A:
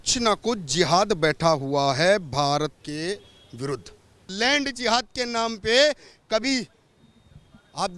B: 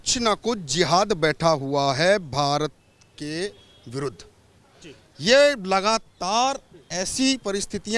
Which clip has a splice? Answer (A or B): A